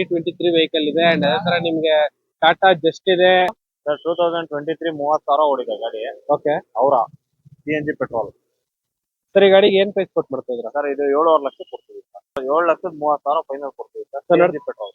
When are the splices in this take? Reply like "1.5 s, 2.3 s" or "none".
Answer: 3.5 s, 12.4 s